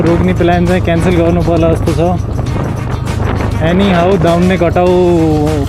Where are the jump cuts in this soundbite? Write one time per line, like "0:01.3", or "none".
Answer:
none

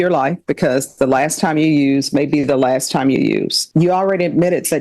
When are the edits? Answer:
0:03.6

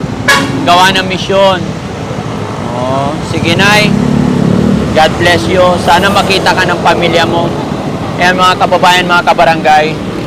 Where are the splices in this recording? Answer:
none

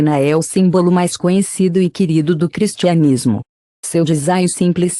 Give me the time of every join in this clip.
0:01.1

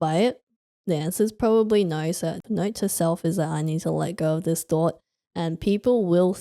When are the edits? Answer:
0:02.4

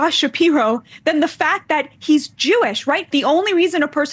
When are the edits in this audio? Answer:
0:03.1

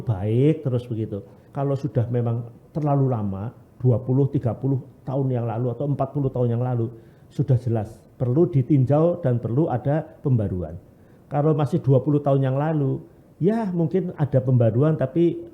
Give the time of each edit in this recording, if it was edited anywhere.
0:01.4

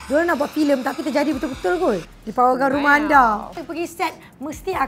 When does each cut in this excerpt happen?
0:02.2
0:03.6

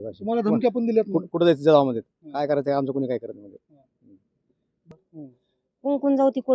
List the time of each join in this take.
0:04.8

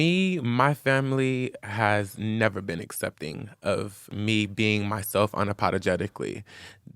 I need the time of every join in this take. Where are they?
0:01.6
0:04.1

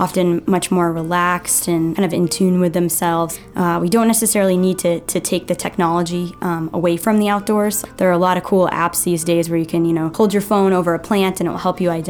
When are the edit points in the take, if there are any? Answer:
0:01.9
0:03.3
0:07.8
0:10.1

